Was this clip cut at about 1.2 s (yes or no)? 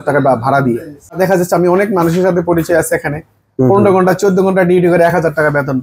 yes